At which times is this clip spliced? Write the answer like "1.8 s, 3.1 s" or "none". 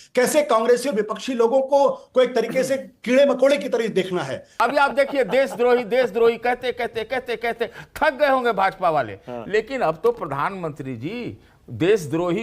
4.5 s